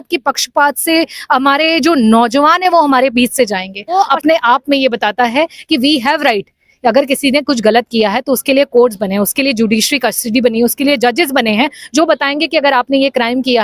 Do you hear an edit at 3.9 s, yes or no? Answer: yes